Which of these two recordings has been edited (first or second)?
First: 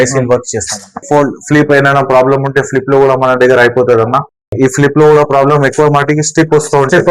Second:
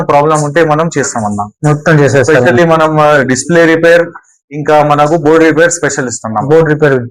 first